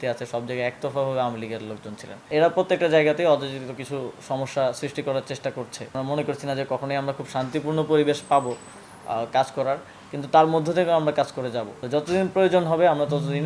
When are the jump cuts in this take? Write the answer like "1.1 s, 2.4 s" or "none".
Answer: 2.3 s, 6.0 s, 11.7 s